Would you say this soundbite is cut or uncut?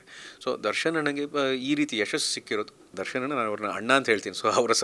cut